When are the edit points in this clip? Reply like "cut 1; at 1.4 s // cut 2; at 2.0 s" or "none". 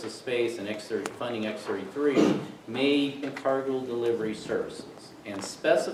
none